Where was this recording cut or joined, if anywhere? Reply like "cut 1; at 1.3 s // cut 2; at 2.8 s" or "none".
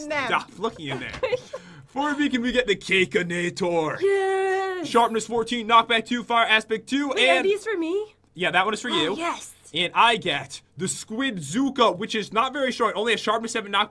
cut 1; at 4.6 s

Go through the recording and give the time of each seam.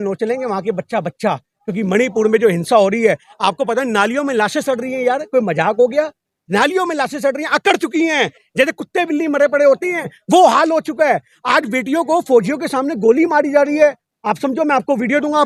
none

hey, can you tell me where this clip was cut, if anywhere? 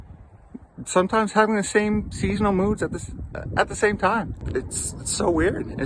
cut 1; at 4.4 s

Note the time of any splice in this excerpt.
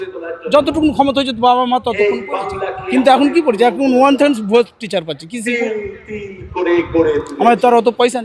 none

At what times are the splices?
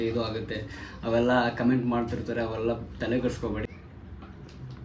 none

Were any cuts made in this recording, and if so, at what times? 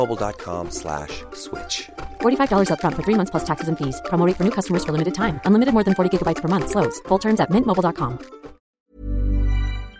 cut 1; at 8.8 s

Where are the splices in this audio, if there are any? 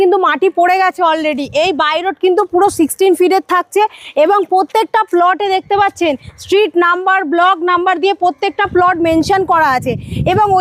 none

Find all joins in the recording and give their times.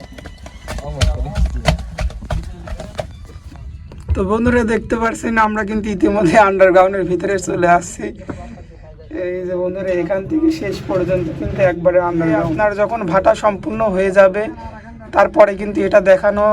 cut 1; at 12.5 s

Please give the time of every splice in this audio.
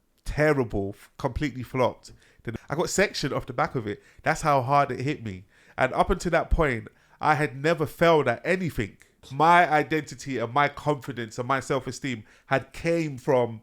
cut 1; at 2.5 s // cut 2; at 9.3 s

